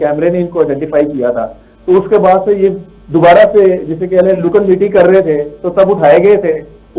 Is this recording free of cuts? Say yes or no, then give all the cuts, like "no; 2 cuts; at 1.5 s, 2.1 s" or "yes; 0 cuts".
yes; 0 cuts